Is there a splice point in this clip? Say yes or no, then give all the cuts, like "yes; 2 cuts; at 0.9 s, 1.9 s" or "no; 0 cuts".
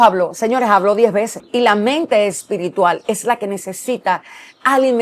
yes; 1 cut; at 1.4 s